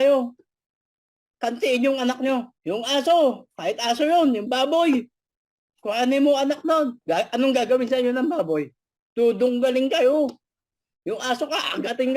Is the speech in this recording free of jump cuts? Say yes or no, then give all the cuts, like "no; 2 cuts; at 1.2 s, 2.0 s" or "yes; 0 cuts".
no; 2 cuts; at 2.5 s, 7.0 s